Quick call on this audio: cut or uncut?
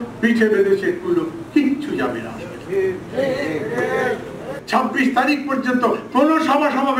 cut